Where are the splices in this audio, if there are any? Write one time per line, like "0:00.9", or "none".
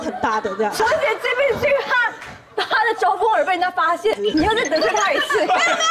0:00.8
0:04.2